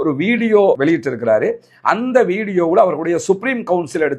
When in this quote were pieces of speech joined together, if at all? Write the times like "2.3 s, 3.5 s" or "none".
none